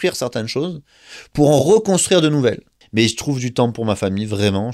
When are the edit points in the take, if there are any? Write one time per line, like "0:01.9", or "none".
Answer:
0:02.7